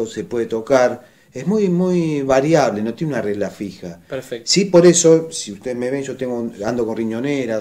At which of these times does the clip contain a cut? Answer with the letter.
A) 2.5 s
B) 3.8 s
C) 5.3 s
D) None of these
C